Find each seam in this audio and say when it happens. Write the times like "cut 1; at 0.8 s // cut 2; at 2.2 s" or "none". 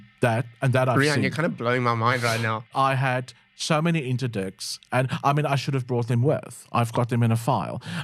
cut 1; at 2.7 s